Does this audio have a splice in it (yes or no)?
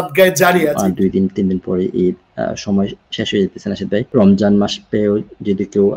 yes